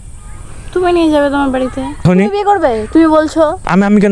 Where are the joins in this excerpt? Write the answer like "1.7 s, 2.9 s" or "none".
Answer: 2.0 s